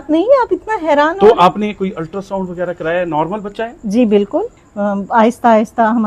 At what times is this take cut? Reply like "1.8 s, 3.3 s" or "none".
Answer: 4.6 s

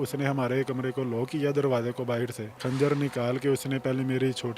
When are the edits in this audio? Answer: 2.6 s

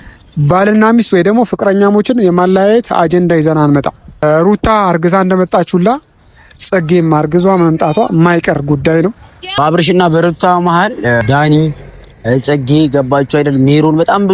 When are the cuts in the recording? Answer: 4.2 s, 9.4 s, 11.2 s

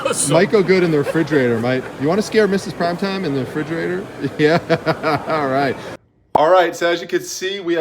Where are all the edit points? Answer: 5.9 s

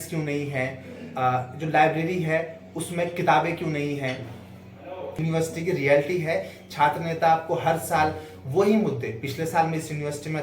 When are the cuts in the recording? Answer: 5.2 s

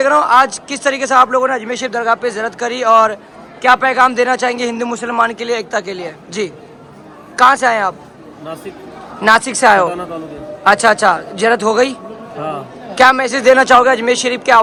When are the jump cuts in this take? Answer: none

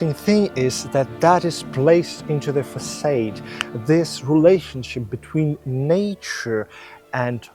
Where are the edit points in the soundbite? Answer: none

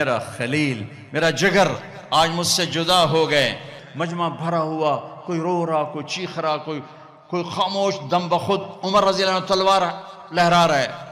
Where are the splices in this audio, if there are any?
3.8 s

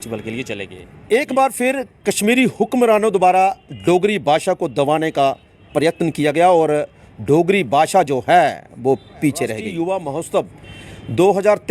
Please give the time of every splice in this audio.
1.0 s, 9.6 s

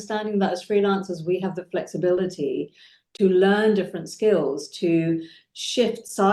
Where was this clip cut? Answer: none

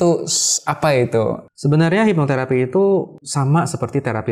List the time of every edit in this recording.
1.5 s, 3.2 s

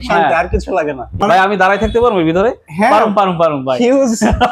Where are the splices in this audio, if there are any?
1.2 s

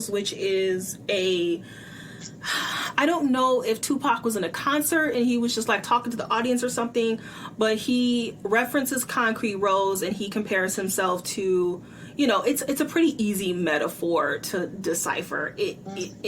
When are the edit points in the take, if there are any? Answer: none

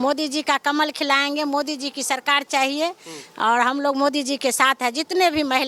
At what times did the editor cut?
none

